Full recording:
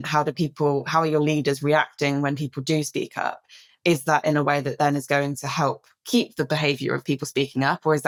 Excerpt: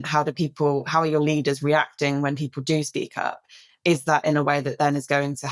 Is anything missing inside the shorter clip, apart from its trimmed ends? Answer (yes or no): no